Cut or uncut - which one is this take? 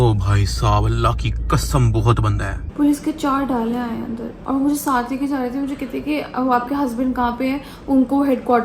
cut